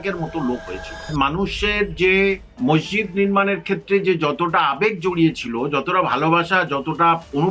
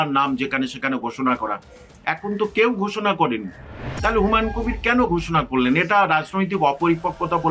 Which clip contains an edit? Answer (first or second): first